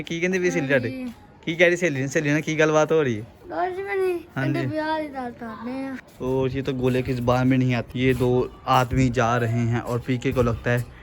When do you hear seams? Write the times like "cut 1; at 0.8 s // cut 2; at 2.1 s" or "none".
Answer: cut 1; at 6.0 s // cut 2; at 7.9 s